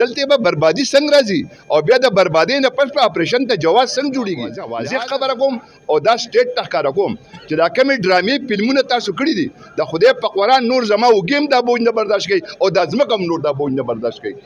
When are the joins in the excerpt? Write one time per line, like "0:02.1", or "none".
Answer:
0:04.6